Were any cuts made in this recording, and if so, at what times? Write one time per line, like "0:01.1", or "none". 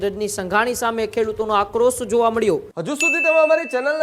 0:02.7